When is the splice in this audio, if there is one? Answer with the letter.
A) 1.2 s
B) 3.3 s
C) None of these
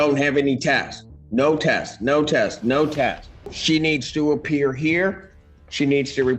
B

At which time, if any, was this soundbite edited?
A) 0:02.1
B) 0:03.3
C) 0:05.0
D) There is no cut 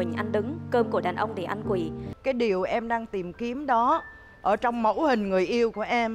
A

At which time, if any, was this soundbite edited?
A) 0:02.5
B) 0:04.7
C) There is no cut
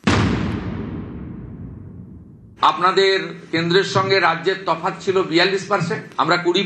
A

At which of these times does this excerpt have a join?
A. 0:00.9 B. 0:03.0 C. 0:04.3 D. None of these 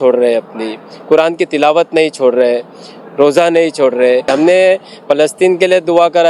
C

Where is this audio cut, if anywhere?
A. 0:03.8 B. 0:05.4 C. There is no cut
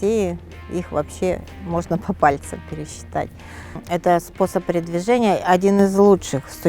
A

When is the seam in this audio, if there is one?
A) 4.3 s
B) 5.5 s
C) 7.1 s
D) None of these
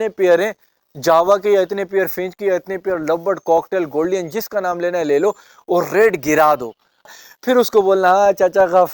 C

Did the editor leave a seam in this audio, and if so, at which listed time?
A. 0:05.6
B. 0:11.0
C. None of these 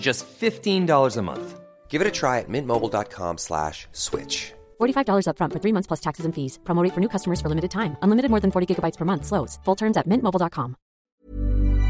B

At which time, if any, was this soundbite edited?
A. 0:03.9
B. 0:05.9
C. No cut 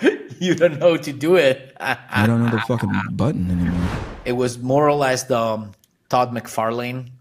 A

